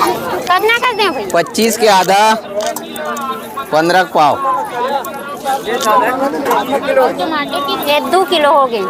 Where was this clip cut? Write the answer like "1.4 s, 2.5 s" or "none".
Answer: none